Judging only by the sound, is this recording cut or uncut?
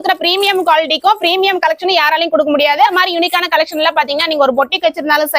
cut